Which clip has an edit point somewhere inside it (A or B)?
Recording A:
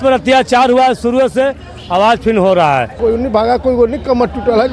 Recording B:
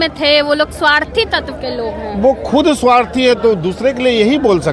A